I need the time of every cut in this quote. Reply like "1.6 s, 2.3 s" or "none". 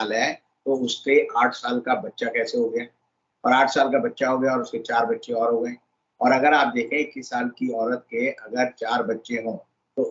none